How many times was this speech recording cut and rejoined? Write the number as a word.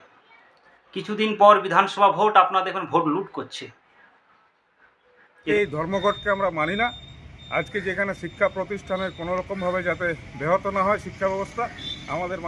one